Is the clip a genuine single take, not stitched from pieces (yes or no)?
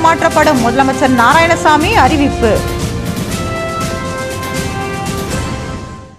no